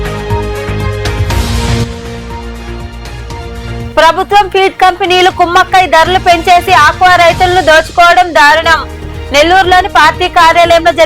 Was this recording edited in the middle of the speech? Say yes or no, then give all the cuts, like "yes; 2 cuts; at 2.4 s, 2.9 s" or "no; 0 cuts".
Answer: yes; 1 cut; at 1.1 s